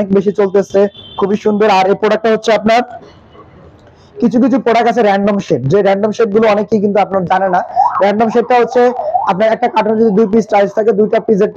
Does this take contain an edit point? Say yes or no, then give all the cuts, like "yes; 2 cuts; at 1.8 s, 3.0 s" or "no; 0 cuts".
no; 0 cuts